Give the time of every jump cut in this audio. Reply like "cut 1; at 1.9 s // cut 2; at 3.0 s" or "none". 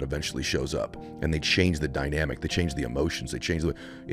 none